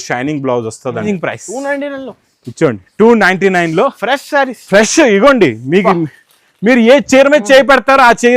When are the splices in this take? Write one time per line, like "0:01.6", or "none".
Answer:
0:01.0